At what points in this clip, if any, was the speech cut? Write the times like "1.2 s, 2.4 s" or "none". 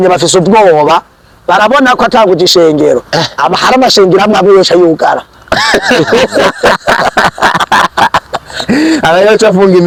none